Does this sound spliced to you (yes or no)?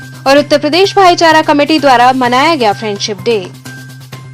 no